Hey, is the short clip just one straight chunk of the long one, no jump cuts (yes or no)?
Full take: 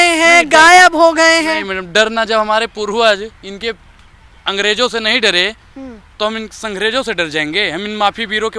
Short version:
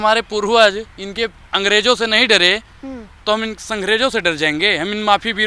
no